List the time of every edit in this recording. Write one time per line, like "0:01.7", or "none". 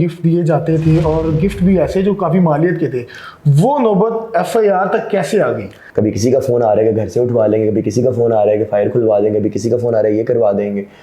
0:05.8